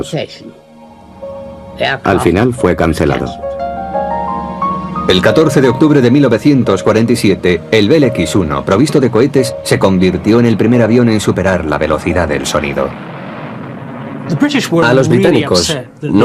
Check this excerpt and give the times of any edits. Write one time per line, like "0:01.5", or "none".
0:02.2